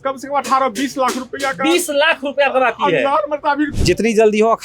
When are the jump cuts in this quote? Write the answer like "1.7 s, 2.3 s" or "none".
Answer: 3.7 s